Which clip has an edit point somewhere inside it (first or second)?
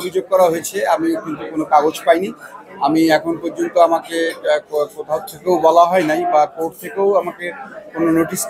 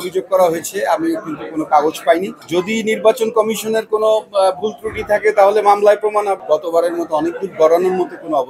second